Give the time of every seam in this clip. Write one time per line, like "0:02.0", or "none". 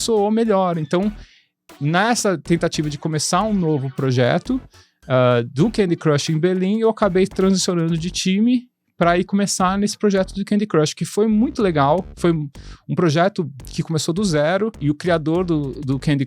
0:14.8